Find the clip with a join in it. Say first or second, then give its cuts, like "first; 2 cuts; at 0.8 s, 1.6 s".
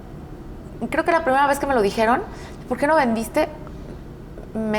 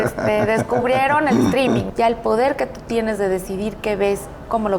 second; 1 cut; at 1.9 s